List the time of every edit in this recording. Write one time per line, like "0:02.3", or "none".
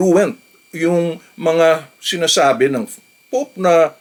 none